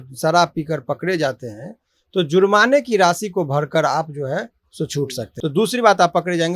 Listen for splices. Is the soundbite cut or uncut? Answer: cut